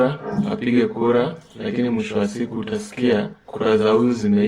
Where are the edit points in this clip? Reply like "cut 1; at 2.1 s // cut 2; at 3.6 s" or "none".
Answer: cut 1; at 3.4 s